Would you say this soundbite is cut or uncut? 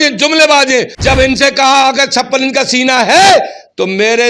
cut